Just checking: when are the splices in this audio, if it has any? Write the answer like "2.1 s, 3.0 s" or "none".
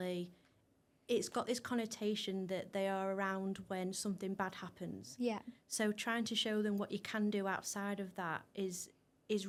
none